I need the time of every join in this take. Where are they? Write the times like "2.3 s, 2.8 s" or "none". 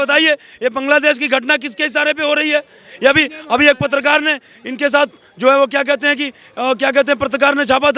none